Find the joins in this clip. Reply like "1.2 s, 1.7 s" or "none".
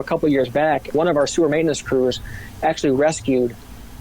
0.9 s